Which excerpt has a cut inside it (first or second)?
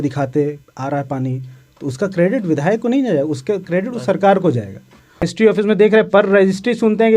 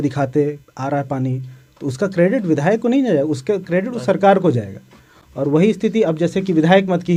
first